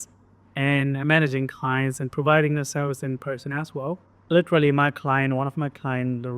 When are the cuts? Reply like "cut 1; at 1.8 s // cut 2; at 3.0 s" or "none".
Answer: cut 1; at 4.1 s

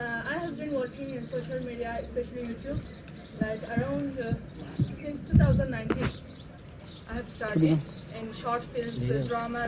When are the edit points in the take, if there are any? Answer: none

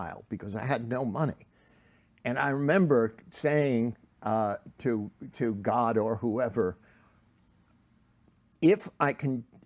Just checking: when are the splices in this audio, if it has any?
none

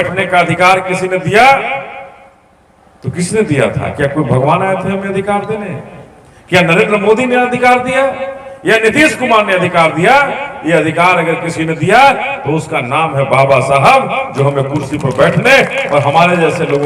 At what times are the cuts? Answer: none

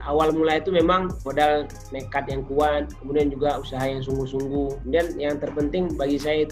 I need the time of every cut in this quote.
cut 1; at 1.2 s // cut 2; at 4.8 s

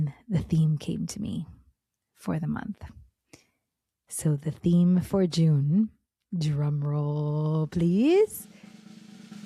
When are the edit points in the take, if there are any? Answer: cut 1; at 8.4 s

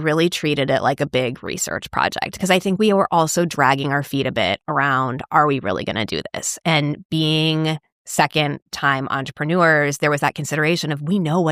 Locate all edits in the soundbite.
none

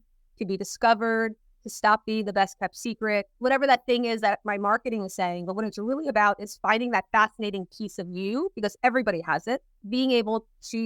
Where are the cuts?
cut 1; at 3.3 s // cut 2; at 9.8 s

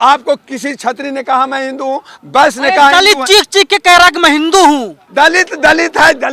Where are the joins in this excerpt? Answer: cut 1; at 2.1 s // cut 2; at 5.0 s

